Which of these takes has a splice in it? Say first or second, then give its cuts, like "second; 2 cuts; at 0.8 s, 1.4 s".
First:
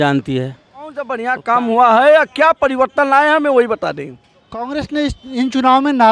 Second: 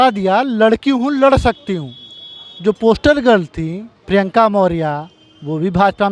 first; 2 cuts; at 1.2 s, 4.6 s